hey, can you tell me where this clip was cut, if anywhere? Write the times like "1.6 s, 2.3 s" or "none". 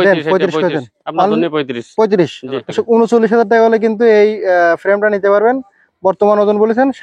2.5 s

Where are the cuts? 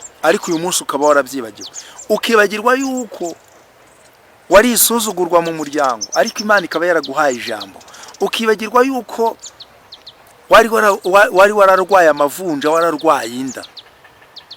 none

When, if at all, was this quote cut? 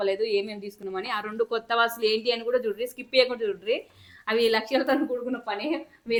none

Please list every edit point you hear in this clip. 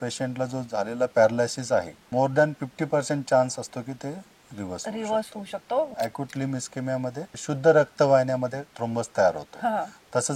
2.1 s, 5.9 s, 7.3 s, 8.7 s

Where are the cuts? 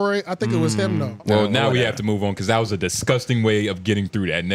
1.1 s

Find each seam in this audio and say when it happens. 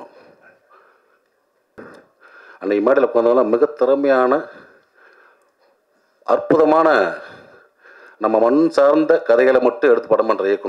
1.8 s

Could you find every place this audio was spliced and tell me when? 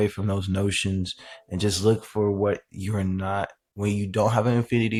none

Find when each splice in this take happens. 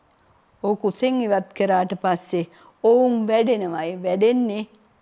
none

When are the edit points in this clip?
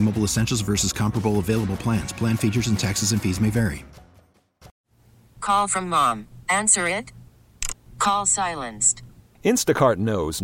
4.7 s

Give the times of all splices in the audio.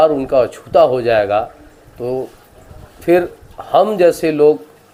none

